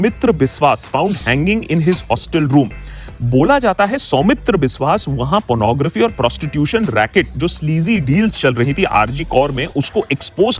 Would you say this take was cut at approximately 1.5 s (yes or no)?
no